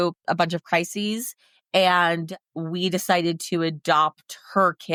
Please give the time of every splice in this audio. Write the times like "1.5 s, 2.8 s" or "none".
none